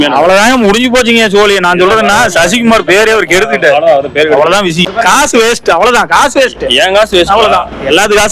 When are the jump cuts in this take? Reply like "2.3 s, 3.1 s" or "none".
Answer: 4.9 s